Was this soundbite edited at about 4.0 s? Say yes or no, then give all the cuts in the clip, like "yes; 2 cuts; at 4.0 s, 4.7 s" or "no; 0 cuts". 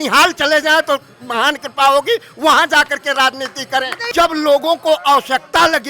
yes; 1 cut; at 4.0 s